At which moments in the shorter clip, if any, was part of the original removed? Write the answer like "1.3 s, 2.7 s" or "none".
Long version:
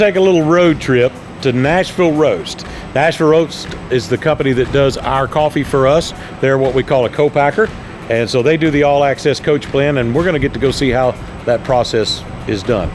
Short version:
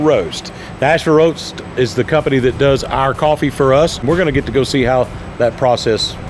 4.0 s